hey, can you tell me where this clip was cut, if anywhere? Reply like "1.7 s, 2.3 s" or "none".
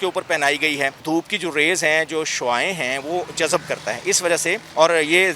1.0 s